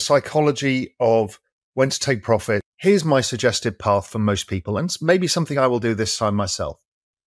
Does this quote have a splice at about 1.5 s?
no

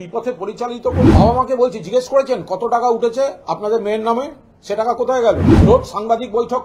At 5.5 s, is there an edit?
yes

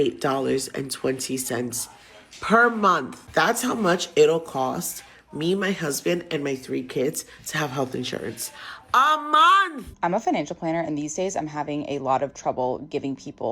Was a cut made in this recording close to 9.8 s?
yes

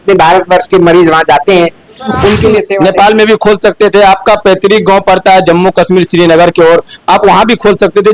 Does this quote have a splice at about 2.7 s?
yes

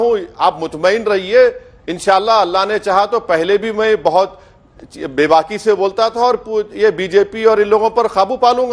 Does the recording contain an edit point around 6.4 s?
no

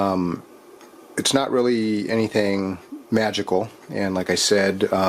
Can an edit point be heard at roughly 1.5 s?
no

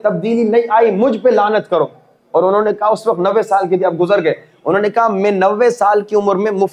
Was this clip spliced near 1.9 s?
no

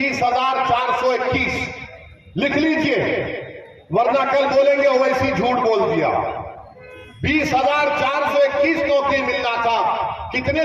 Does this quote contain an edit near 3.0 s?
no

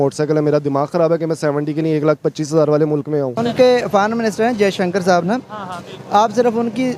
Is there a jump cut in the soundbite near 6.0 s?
no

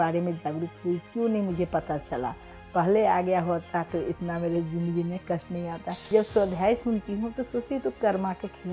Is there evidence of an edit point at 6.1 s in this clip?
yes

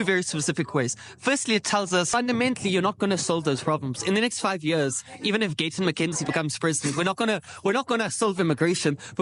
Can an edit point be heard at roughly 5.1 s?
no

